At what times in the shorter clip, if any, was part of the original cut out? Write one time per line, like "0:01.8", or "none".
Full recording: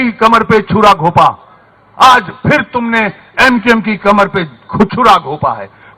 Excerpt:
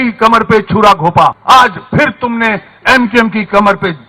0:01.4